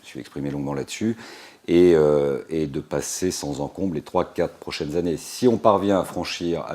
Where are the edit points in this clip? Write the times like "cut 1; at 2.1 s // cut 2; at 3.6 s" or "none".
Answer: cut 1; at 1.5 s